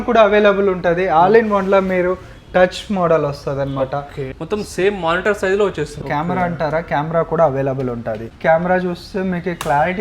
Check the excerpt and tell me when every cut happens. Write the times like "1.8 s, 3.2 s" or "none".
4.3 s, 6.0 s, 8.3 s

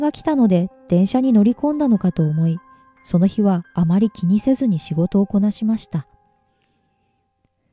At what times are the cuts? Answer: none

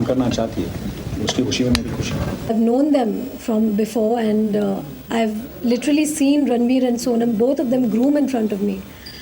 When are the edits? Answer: 1.0 s, 2.5 s

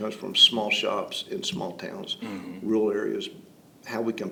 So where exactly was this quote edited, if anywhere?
none

